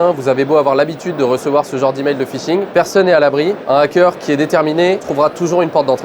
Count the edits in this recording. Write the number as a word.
one